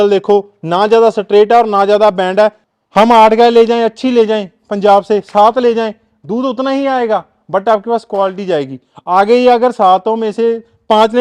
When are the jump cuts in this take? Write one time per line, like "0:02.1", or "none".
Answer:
0:02.6